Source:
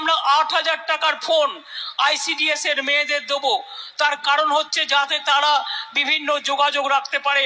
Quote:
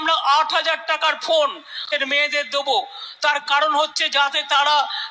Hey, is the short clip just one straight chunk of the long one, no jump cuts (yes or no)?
no